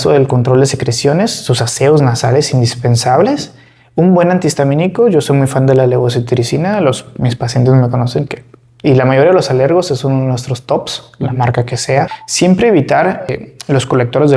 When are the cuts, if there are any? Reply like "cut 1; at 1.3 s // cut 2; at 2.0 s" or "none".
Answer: cut 1; at 12.2 s // cut 2; at 13.4 s